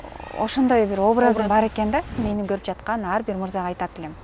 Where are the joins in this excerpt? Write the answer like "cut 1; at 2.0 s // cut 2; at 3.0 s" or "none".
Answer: cut 1; at 2.2 s